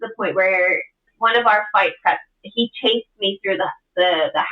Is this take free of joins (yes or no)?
no